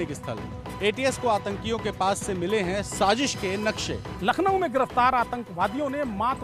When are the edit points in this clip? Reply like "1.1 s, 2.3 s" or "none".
4.1 s